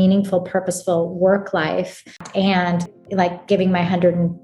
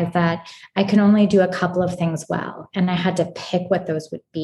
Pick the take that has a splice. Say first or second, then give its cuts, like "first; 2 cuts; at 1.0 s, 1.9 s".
first; 2 cuts; at 2.2 s, 3.0 s